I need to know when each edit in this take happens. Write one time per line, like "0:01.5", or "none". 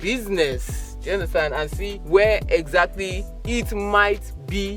0:01.9

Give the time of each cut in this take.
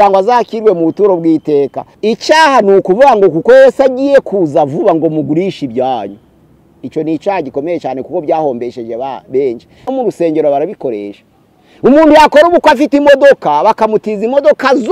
0:01.9
0:09.9

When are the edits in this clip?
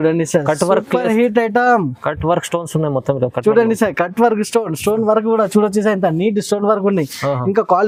none

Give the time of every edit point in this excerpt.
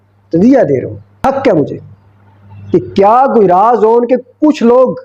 0:01.0

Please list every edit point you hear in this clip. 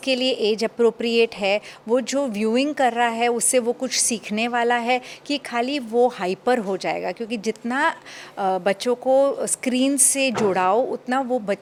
none

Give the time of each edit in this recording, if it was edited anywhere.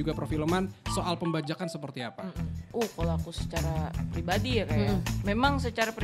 0:02.6

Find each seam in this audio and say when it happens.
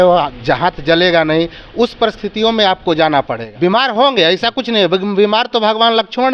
0:03.4

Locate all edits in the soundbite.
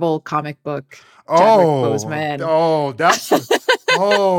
0:01.3

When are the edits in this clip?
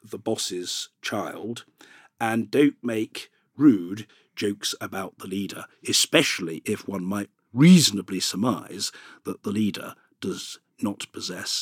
0:04.2

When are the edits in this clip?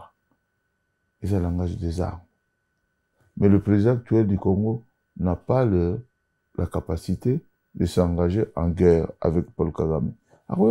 none

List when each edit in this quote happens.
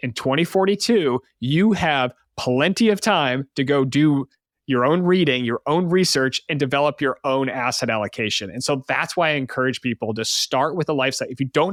none

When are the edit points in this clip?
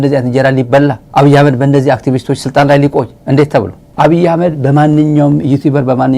0:01.0
0:03.4

